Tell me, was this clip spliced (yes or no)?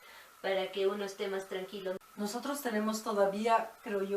yes